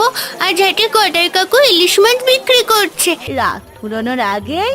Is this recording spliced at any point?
yes; 1 cut; at 3.2 s

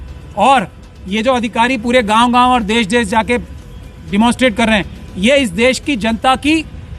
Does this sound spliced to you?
no; 0 cuts

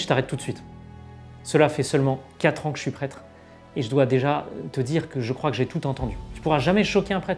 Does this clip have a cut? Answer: yes; 1 cut; at 6.2 s

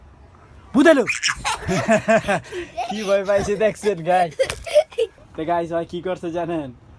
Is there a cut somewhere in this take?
yes; 1 cut; at 5.2 s

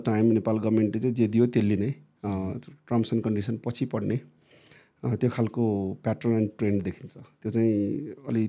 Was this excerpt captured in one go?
yes; 0 cuts

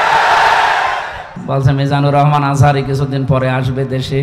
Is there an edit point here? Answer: yes; 1 cut; at 1.3 s

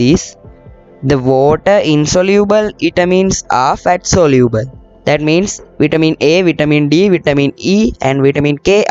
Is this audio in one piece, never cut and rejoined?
yes; 0 cuts

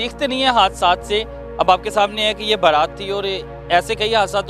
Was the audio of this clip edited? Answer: no; 0 cuts

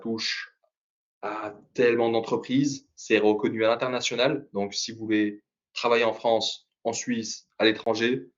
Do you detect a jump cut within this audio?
no; 0 cuts

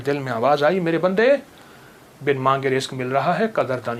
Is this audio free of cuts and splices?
yes; 0 cuts

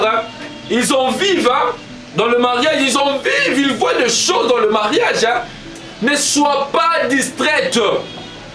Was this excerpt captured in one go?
no; 1 cut; at 5.7 s

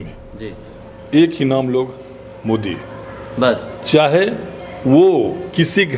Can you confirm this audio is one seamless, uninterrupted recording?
yes; 0 cuts

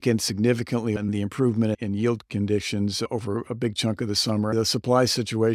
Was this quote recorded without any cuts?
no; 2 cuts; at 1.0 s, 4.5 s

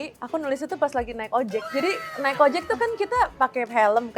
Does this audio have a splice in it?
yes; 1 cut; at 1.7 s

